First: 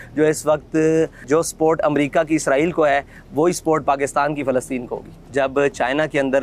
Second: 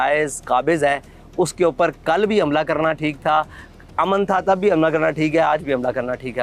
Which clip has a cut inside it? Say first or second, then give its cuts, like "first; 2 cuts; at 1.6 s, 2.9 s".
first; 2 cuts; at 1.2 s, 5.2 s